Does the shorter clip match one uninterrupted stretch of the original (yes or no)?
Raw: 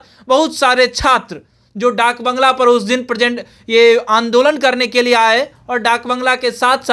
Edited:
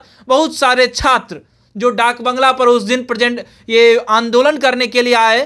yes